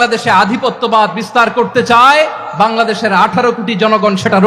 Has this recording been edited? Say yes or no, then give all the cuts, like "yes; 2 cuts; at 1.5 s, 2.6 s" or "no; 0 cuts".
no; 0 cuts